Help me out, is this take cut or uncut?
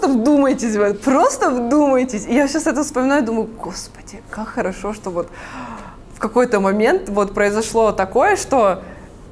uncut